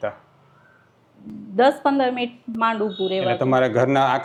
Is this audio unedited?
yes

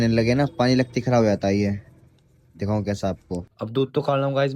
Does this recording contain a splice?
yes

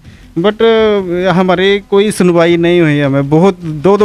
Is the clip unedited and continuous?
yes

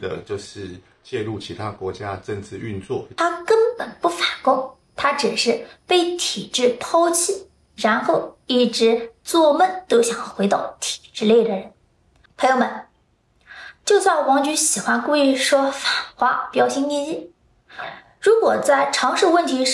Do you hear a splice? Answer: yes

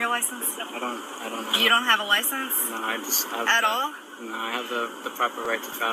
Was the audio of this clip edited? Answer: no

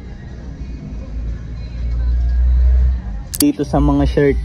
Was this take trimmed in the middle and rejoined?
no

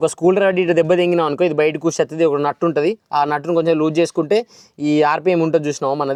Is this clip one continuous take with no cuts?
yes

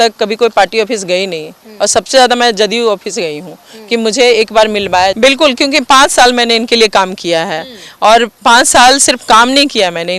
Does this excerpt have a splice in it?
yes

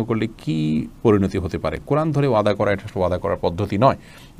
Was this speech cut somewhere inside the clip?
no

